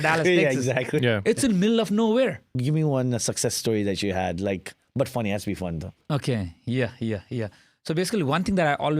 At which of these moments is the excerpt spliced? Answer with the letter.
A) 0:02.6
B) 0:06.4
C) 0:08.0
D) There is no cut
A